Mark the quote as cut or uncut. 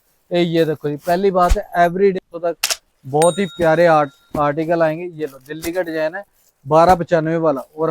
cut